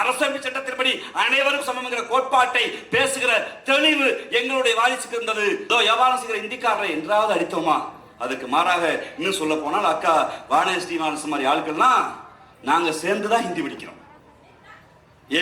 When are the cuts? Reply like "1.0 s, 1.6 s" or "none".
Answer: 5.6 s